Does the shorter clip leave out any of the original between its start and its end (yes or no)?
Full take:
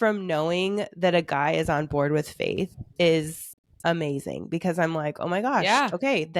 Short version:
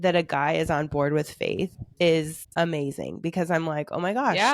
yes